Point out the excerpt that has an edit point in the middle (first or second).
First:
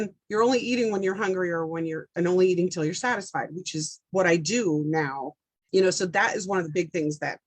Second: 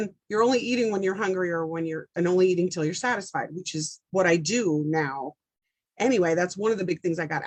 first